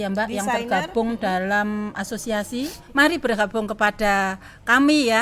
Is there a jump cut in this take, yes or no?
yes